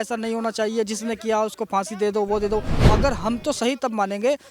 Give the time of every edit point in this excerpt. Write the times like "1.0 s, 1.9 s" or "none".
2.7 s

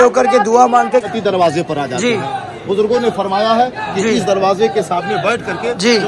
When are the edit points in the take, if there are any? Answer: 1.1 s

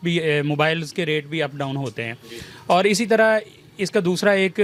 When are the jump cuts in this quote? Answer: none

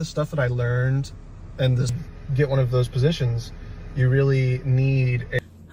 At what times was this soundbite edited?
none

